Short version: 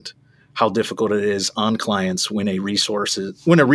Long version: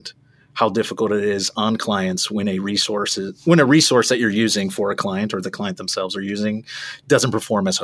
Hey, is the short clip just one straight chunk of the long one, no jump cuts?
yes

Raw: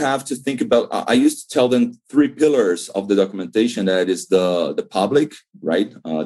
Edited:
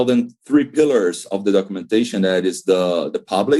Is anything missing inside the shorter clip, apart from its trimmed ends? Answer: no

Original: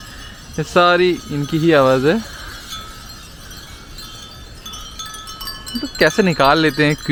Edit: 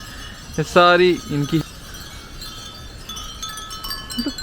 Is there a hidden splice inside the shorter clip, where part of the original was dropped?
yes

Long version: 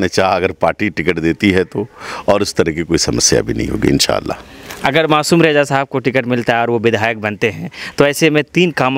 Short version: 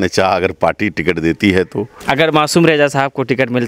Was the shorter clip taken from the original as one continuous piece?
no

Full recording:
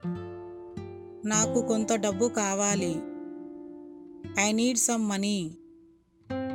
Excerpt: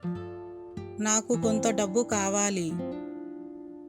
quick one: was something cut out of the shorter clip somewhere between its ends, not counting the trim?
yes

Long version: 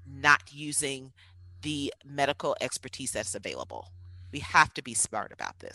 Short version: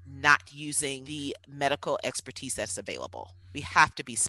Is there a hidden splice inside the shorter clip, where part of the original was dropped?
yes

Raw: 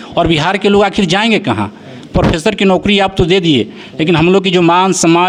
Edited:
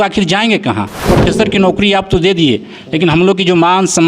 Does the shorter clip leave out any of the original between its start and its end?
yes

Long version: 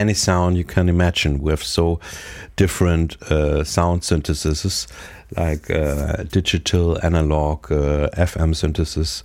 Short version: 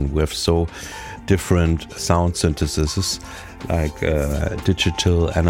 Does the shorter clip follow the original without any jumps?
no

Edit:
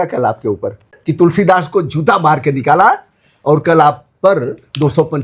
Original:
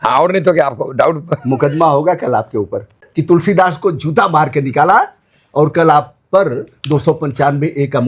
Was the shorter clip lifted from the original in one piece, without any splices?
yes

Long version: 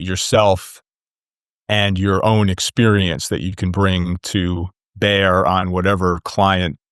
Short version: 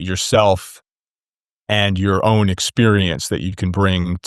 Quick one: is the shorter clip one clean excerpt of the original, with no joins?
yes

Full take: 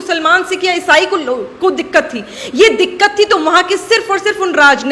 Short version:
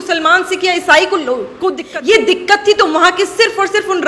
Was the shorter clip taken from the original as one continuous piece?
no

